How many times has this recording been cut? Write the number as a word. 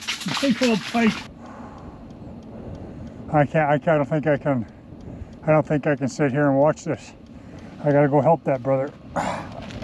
one